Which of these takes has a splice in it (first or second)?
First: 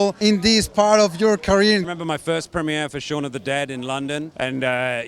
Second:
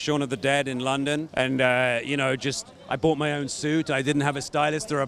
first